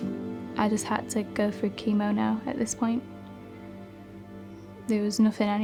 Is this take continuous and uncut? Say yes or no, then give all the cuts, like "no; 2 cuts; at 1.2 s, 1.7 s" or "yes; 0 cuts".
yes; 0 cuts